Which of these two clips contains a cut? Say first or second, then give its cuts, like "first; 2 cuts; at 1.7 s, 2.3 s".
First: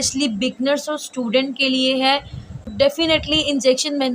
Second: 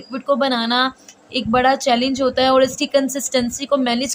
first; 1 cut; at 2.6 s